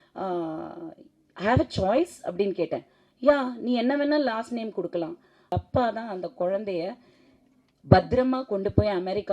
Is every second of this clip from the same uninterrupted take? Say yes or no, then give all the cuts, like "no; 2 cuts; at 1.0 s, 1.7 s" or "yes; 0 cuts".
no; 1 cut; at 5.5 s